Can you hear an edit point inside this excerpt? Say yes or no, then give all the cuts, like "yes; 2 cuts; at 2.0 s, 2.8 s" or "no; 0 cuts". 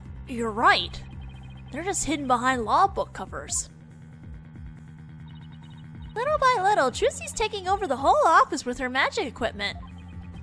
yes; 1 cut; at 2.7 s